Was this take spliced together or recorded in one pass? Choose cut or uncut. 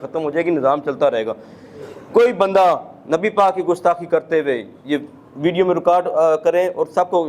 uncut